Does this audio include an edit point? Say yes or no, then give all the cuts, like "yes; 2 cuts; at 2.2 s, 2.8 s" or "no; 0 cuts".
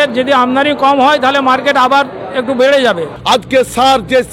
yes; 1 cut; at 3.1 s